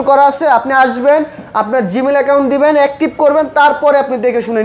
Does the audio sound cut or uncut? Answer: uncut